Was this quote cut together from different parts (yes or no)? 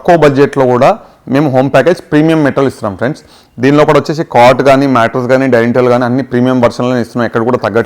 no